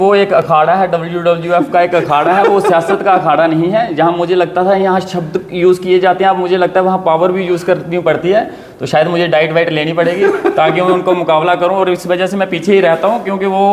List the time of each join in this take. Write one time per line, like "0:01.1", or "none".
none